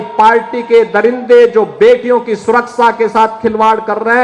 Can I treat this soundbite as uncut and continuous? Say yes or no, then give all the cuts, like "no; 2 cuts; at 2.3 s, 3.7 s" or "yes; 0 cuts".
yes; 0 cuts